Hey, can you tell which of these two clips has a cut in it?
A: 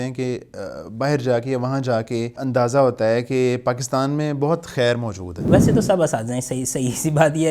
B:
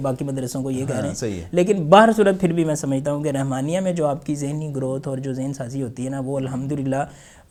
A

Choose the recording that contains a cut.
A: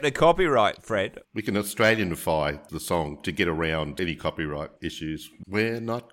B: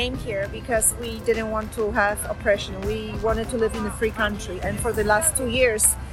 A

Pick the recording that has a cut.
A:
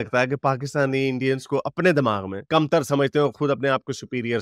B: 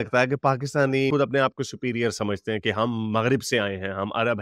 B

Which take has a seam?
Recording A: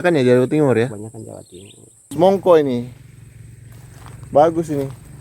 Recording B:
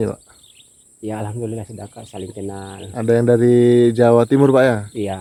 A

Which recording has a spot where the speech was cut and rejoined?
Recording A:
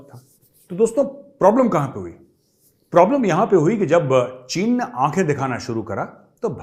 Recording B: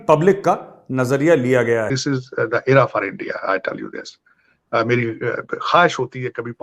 B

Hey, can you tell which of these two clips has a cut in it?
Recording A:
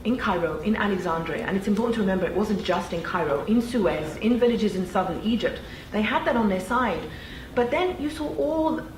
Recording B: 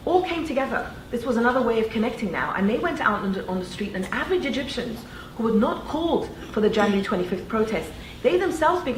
A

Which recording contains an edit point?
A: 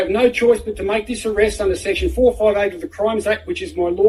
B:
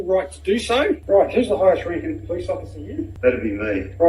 B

